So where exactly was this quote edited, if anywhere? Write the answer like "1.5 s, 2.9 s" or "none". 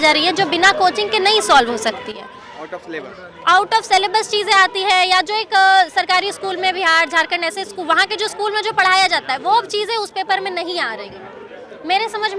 none